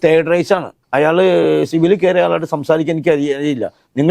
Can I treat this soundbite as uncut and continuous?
no; 1 cut; at 1.7 s

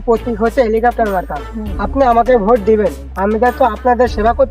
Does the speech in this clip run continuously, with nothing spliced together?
yes; 0 cuts

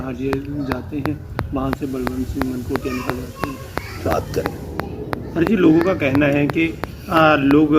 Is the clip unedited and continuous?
no; 1 cut; at 4.1 s

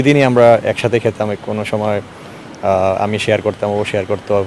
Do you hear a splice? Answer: no; 0 cuts

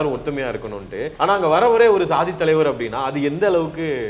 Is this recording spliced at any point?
yes; 1 cut; at 1.1 s

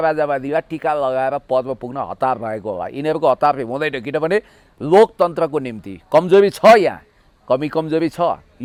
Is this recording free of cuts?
yes; 0 cuts

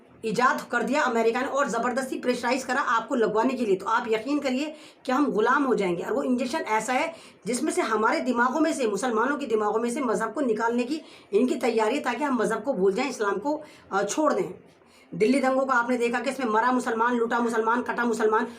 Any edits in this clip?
yes; 1 cut; at 15.0 s

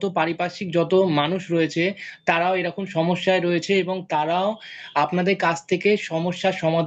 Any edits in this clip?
no; 0 cuts

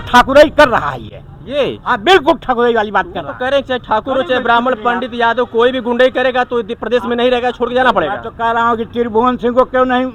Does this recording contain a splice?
no; 0 cuts

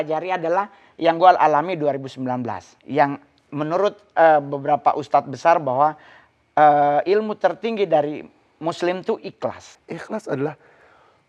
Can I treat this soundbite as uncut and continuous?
no; 1 cut; at 9.7 s

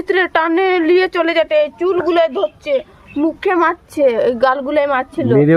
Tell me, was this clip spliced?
no; 0 cuts

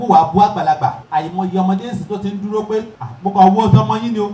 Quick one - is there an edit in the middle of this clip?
yes; 2 cuts; at 1.0 s, 3.0 s

